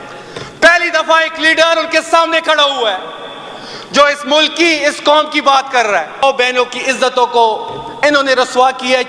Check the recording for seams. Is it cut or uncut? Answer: cut